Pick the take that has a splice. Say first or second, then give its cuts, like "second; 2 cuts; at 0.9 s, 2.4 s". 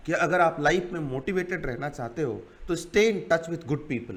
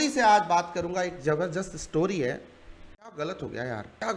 second; 1 cut; at 3.1 s